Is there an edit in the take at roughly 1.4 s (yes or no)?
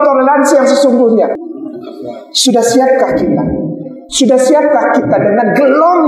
yes